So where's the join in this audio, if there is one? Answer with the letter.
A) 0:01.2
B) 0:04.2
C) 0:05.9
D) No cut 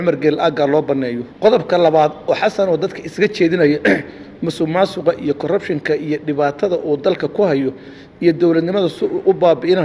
A